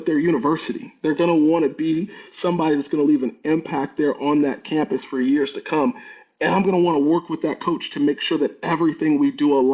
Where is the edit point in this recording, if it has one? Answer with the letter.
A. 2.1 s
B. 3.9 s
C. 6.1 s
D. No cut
D